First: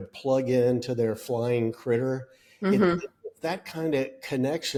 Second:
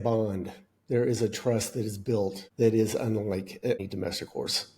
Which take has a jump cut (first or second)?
second